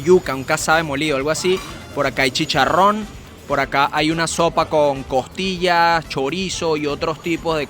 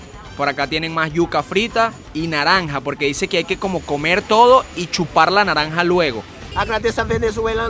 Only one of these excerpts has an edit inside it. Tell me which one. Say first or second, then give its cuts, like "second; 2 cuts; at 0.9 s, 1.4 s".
second; 2 cuts; at 2.0 s, 6.5 s